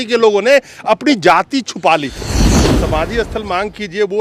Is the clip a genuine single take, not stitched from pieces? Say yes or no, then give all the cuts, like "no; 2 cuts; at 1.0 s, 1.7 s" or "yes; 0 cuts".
no; 1 cut; at 2.7 s